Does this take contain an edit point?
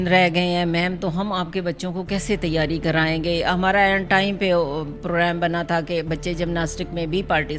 no; 0 cuts

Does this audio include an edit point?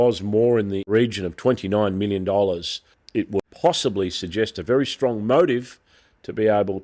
yes; 2 cuts; at 0.9 s, 3.4 s

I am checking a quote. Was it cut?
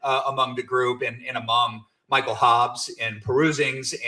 no; 0 cuts

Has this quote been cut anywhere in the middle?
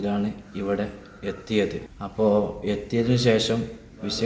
yes; 1 cut; at 1.8 s

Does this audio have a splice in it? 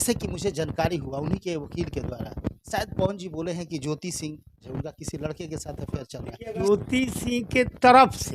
yes; 3 cuts; at 2.6 s, 4.7 s, 6.7 s

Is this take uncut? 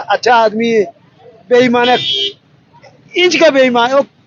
yes; 0 cuts

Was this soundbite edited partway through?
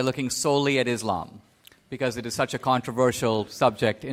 no; 0 cuts

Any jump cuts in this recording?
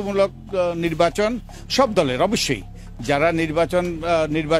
no; 0 cuts

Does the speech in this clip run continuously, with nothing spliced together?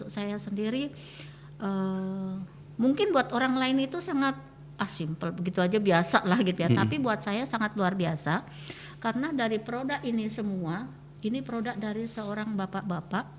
yes; 0 cuts

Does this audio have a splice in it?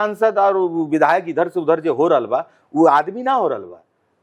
no; 0 cuts

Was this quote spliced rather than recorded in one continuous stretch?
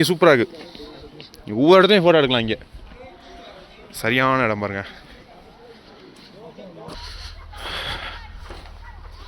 yes; 1 cut; at 6.9 s

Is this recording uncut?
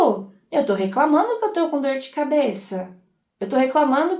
yes; 0 cuts

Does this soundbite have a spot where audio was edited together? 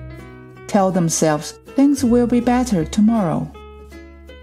yes; 1 cut; at 3.5 s

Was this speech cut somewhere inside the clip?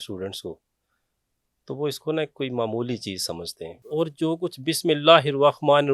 yes; 1 cut; at 3.8 s

